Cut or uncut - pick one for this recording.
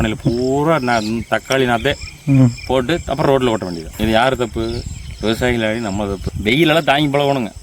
cut